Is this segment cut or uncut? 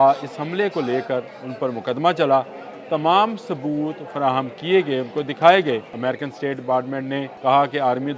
cut